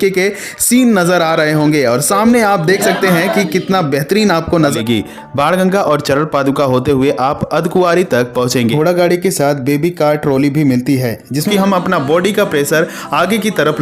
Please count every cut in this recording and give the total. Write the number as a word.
three